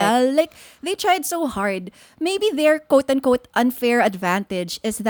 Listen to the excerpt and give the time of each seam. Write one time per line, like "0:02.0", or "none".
none

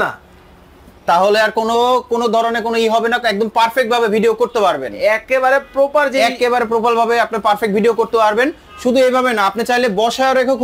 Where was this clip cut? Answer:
none

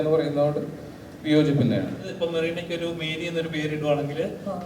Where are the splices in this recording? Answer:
0:02.1

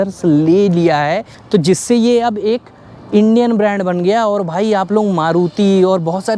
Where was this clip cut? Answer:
none

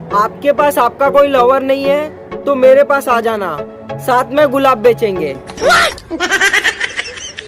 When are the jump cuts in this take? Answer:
none

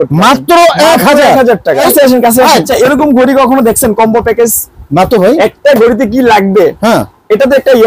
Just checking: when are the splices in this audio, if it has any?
0:01.8
0:02.7

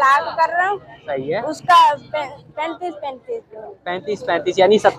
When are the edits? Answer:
none

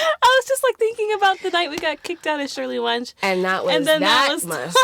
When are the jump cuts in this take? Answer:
none

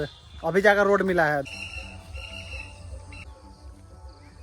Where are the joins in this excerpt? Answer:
0:01.4
0:03.3

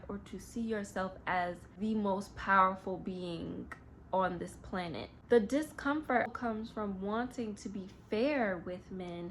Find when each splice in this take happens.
0:01.7
0:05.1
0:06.3

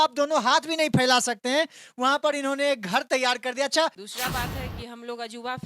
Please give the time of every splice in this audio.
0:04.1

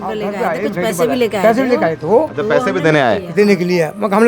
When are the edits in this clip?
none

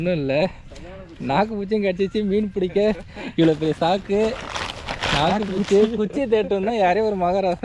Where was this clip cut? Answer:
none

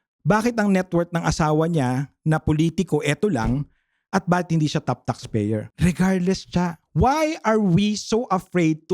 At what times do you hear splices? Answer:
0:05.7

